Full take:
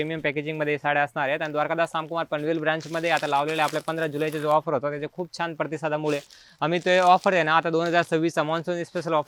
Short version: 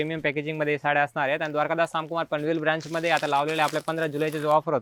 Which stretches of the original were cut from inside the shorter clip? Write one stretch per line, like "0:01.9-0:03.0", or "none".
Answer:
none